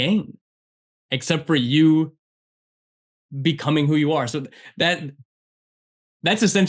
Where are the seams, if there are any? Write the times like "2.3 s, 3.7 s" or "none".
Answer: none